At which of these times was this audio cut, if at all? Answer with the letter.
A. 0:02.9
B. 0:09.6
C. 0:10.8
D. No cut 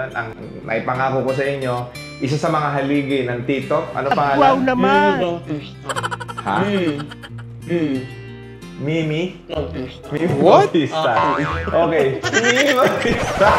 D